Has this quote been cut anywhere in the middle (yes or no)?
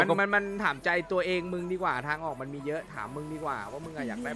no